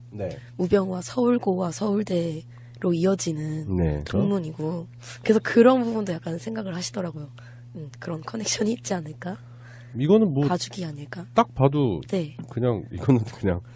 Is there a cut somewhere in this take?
no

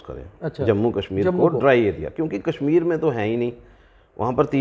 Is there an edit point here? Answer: no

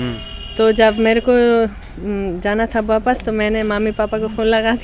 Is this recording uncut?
yes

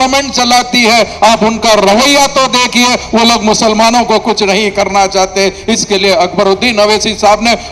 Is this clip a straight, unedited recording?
yes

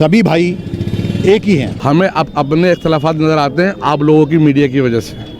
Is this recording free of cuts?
no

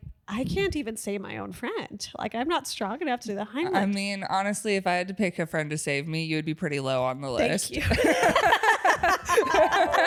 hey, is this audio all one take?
yes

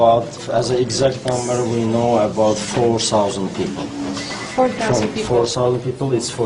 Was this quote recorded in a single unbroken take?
yes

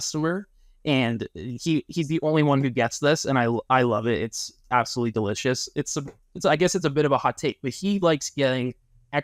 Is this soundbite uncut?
yes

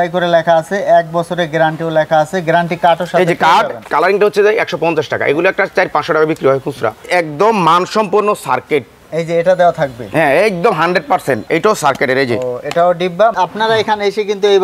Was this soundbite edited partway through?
yes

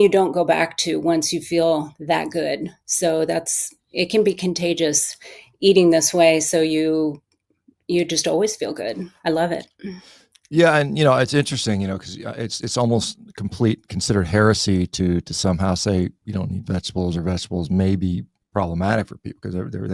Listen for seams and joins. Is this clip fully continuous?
yes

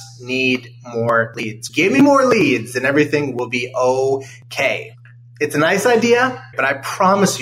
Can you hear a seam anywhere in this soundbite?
yes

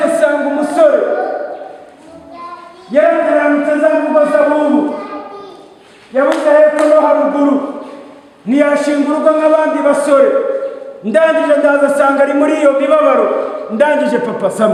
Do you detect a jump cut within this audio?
no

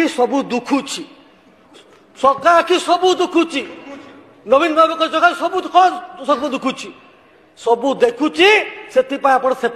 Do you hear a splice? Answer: no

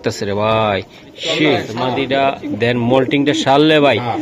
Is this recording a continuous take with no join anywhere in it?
no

